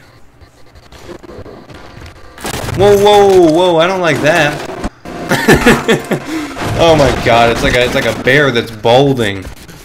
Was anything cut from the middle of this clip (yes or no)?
no